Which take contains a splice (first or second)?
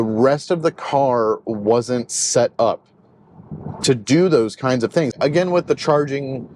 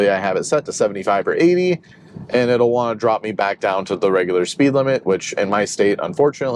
first